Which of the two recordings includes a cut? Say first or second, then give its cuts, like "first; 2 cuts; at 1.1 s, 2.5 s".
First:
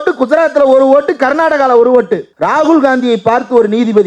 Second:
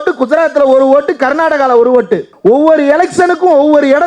first; 1 cut; at 2.3 s